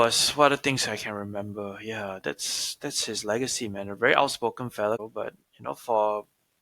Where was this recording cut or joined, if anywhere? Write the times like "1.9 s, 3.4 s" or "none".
5.0 s